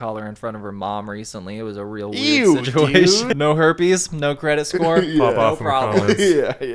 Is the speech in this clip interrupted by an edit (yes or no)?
yes